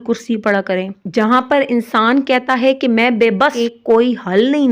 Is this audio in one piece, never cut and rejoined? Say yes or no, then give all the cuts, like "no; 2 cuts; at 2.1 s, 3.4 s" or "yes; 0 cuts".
no; 2 cuts; at 1.0 s, 3.5 s